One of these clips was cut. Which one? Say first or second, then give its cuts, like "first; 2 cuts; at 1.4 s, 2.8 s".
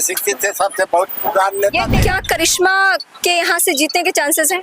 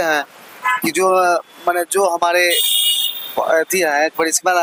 first; 1 cut; at 1.9 s